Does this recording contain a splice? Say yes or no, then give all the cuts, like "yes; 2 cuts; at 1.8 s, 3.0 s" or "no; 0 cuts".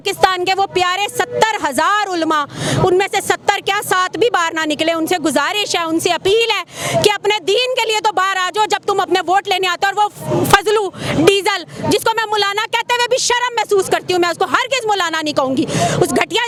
no; 0 cuts